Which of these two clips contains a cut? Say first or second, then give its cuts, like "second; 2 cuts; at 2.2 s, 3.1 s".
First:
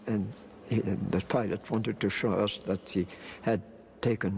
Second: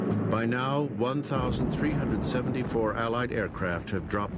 first; 1 cut; at 2.6 s